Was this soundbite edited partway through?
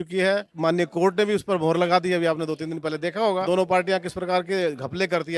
no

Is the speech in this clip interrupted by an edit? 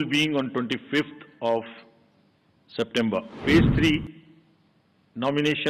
yes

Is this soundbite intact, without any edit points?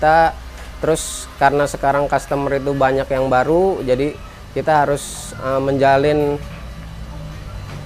yes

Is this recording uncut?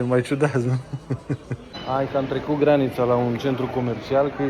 no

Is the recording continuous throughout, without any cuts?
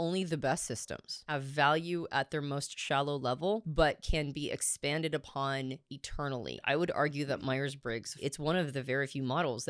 no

